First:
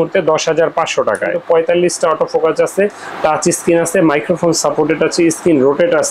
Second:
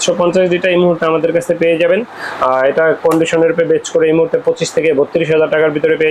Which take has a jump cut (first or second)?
first